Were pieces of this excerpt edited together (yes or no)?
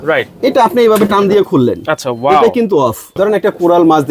yes